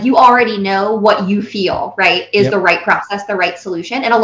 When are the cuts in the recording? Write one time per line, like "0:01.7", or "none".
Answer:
none